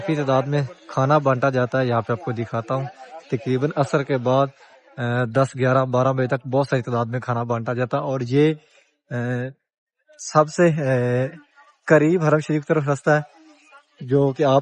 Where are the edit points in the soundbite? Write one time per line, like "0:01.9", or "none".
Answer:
none